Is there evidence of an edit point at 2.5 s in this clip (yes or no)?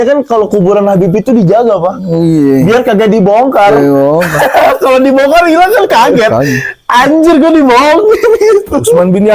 no